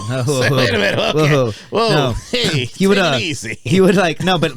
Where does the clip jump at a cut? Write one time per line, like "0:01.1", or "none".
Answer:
none

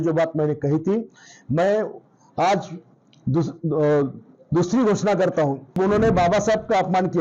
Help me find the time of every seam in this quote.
0:05.8

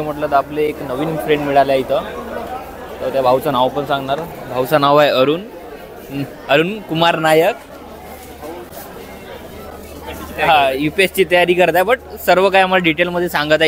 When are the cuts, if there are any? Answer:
none

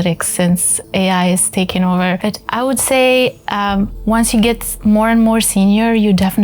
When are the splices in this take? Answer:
0:02.2

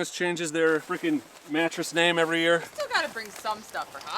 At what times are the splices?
0:00.9
0:02.7

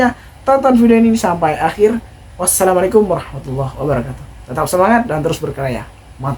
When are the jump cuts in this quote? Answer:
none

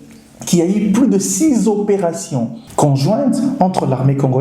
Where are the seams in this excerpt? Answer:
0:02.6

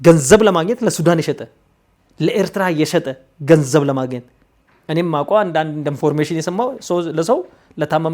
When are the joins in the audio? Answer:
none

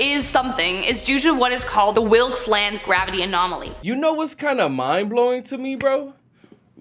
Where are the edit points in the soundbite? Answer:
0:03.8

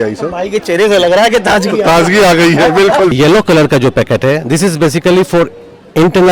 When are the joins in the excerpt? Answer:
0:03.1

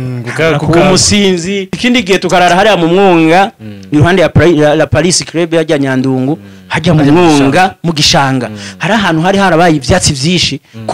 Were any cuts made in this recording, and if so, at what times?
0:01.7

